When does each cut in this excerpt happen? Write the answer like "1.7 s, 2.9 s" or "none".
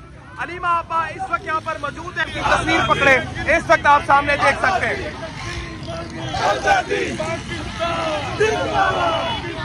2.3 s